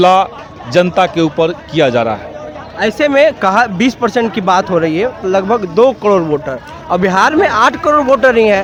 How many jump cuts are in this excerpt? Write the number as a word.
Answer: zero